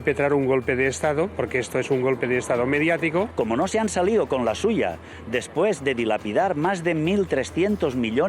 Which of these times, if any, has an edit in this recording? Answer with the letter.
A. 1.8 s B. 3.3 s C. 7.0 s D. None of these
B